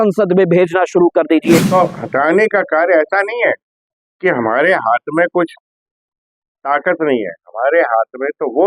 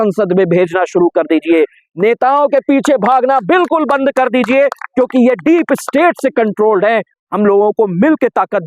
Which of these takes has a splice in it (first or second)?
first